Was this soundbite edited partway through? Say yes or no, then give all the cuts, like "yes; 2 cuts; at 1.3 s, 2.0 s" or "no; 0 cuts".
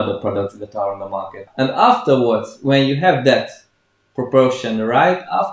yes; 1 cut; at 1.4 s